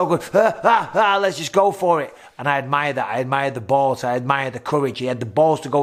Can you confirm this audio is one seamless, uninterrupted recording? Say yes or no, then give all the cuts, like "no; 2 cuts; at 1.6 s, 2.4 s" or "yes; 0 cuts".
yes; 0 cuts